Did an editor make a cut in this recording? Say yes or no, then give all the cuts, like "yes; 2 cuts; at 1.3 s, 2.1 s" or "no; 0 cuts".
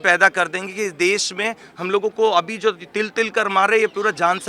no; 0 cuts